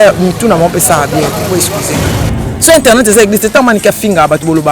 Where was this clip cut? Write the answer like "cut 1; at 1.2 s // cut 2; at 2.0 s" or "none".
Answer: cut 1; at 2.3 s